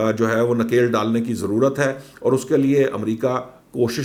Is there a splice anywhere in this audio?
no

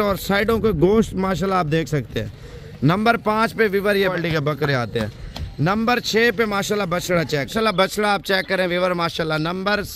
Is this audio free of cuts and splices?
no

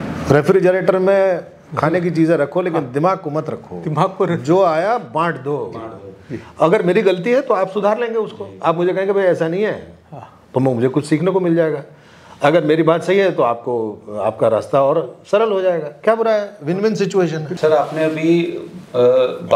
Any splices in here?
yes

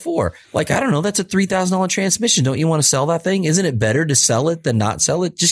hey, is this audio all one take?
yes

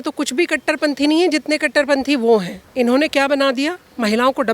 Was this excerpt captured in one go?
no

